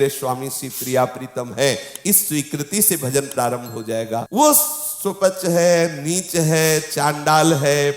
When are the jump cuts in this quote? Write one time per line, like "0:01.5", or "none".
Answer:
0:04.3